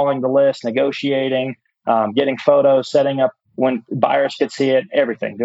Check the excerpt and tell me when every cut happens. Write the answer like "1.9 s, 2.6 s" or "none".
3.4 s